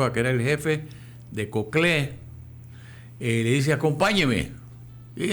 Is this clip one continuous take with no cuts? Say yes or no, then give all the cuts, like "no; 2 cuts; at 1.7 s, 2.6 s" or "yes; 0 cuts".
yes; 0 cuts